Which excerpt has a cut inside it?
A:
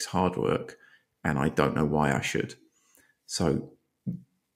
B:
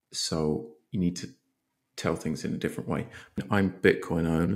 B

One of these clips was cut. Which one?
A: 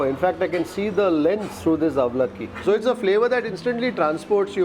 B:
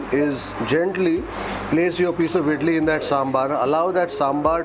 A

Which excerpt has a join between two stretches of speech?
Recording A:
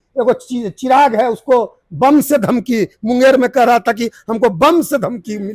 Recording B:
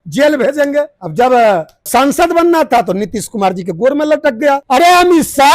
B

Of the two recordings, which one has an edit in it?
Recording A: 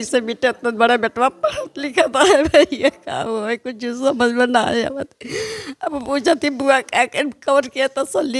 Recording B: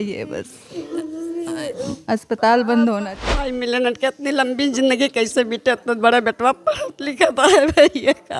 B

